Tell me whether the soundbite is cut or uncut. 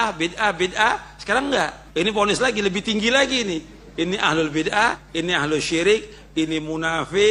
cut